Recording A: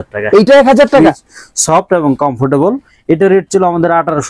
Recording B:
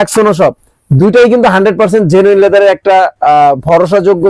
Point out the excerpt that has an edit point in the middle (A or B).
A